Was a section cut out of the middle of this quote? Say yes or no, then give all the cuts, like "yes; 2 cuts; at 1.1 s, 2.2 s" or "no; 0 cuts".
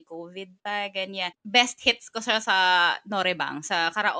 yes; 1 cut; at 1.4 s